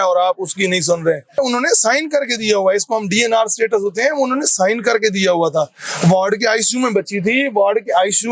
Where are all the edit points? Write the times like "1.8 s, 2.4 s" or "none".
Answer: 1.4 s